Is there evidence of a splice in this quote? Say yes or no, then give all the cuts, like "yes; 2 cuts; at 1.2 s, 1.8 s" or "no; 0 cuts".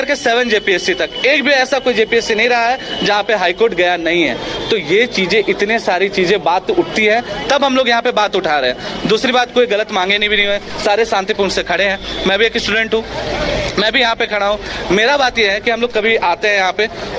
no; 0 cuts